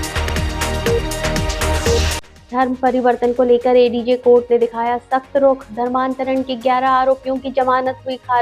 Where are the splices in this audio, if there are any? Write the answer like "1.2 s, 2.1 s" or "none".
1.9 s